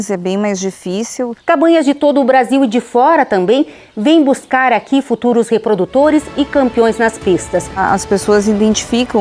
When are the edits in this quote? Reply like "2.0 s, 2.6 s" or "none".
1.3 s, 7.8 s